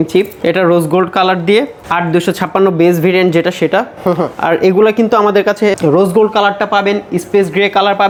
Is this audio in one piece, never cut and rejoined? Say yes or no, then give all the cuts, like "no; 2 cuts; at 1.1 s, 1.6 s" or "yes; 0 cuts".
yes; 0 cuts